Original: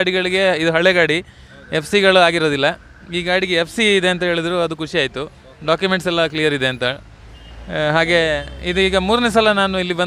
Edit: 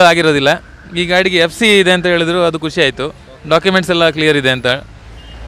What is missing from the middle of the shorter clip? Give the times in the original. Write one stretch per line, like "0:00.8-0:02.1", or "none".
none